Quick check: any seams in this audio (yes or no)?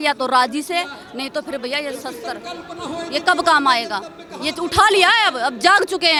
no